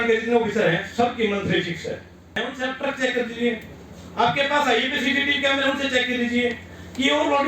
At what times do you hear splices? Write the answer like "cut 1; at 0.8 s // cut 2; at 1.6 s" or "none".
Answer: cut 1; at 2.4 s